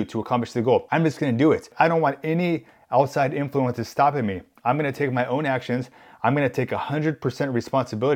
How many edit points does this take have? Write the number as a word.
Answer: two